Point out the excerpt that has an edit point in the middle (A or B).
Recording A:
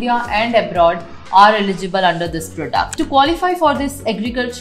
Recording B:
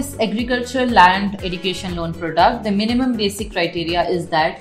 A